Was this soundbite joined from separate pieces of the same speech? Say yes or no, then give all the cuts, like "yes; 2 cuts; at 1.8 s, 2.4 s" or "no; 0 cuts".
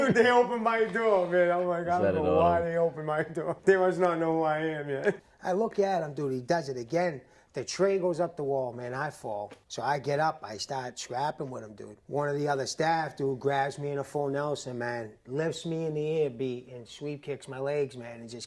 yes; 2 cuts; at 3.5 s, 5.3 s